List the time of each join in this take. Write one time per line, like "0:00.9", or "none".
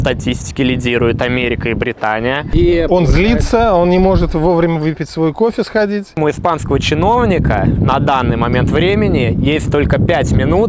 0:02.5
0:06.1

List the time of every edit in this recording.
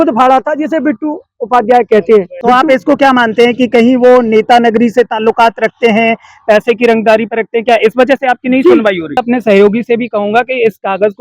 0:02.3
0:09.1

